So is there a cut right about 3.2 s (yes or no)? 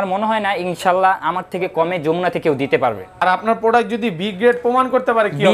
yes